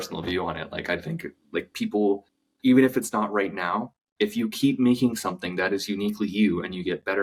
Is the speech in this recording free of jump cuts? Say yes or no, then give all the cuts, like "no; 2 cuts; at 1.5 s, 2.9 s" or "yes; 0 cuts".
yes; 0 cuts